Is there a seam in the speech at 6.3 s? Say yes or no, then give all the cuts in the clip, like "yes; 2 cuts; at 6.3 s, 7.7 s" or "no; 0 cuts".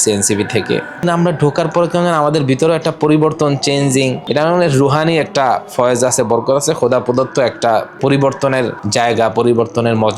no; 4 cuts; at 1.0 s, 4.2 s, 7.9 s, 8.8 s